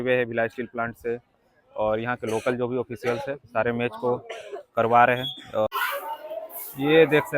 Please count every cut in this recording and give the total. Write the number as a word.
one